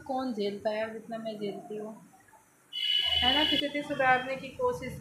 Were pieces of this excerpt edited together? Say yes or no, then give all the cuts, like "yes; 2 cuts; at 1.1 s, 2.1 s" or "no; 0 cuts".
yes; 1 cut; at 3.6 s